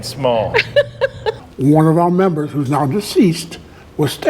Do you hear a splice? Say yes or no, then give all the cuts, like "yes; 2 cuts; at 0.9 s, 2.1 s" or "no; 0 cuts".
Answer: yes; 1 cut; at 1.4 s